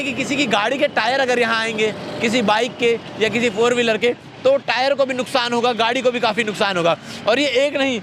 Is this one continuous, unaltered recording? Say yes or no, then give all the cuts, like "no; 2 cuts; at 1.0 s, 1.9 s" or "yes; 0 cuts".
yes; 0 cuts